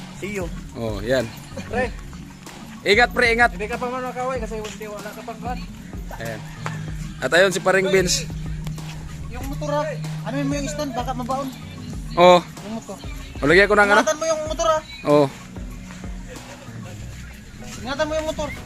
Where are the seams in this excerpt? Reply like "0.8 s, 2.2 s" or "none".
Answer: none

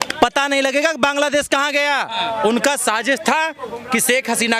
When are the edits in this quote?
2.1 s

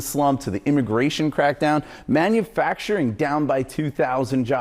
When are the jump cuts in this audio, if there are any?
2.0 s

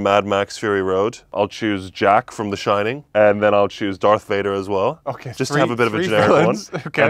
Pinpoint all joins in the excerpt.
1.3 s, 3.0 s

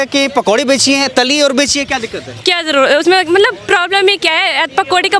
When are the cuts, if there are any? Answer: none

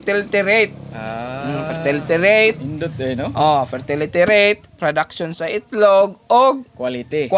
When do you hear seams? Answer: none

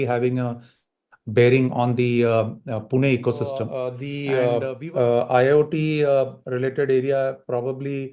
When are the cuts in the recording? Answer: 4.1 s

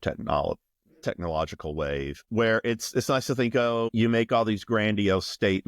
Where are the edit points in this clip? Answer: 2.3 s, 3.9 s

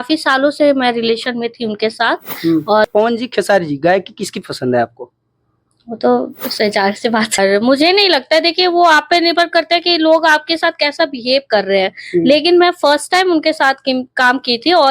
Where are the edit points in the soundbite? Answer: 2.9 s, 7.4 s

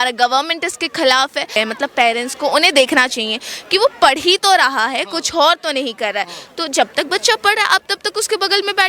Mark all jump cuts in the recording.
1.6 s

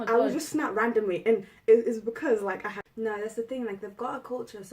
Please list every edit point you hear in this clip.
2.8 s

